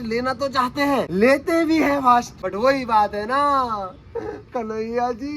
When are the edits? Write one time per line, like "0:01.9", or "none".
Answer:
0:01.1
0:02.4